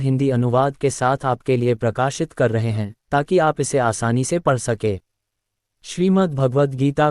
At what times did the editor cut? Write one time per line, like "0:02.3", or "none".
0:05.7